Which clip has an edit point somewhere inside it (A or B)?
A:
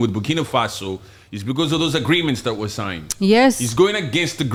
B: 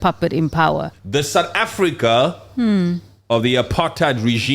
B